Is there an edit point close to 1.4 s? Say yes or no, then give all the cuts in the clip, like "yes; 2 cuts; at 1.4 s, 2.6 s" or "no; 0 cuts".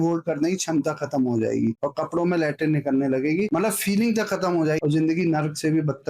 no; 2 cuts; at 3.5 s, 4.8 s